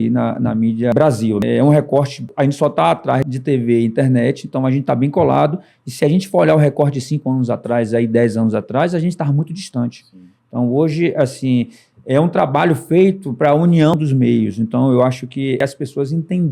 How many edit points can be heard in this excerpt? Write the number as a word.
five